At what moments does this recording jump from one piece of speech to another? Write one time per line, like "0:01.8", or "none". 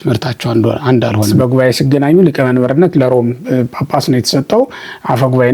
0:01.3